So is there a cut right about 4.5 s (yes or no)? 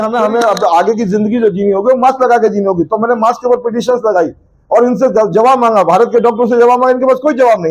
no